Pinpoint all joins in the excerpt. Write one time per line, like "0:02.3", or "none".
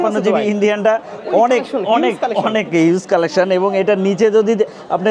none